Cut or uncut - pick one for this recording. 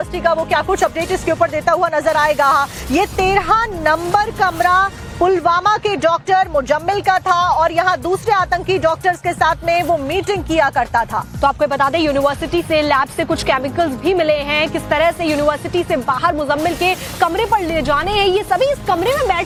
uncut